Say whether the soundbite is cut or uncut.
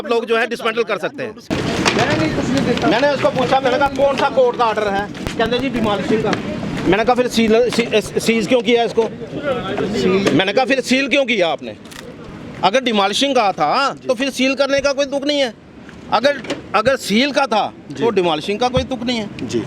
cut